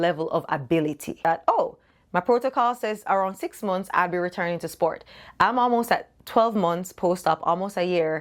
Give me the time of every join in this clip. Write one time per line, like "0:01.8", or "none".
0:01.2